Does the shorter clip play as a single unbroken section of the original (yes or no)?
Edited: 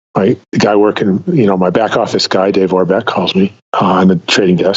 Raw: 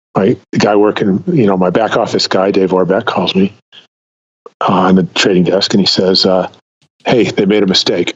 no